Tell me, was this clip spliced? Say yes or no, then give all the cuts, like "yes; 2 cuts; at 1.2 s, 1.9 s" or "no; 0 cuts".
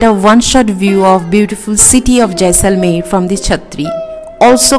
no; 0 cuts